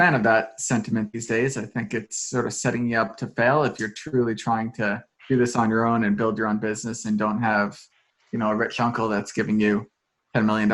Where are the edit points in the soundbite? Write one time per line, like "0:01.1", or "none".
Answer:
none